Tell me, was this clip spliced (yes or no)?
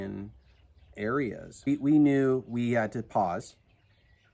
yes